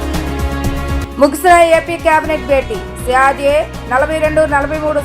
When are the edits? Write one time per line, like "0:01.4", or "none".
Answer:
0:01.0